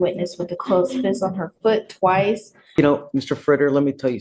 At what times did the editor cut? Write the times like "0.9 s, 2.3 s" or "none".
2.8 s